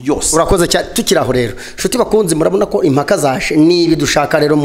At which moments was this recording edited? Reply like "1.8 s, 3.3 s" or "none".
none